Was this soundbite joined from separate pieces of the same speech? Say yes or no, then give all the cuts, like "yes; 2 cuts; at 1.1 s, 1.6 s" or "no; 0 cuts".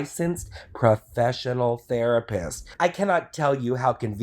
yes; 1 cut; at 2.6 s